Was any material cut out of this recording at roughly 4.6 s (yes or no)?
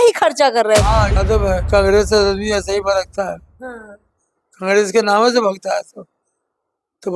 no